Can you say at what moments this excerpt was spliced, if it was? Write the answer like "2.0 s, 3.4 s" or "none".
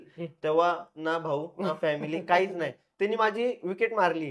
2.9 s